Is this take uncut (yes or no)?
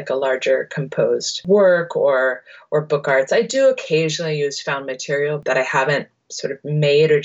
no